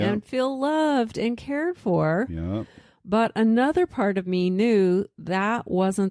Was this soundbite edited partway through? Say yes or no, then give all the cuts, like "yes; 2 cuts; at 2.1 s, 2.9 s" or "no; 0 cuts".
no; 0 cuts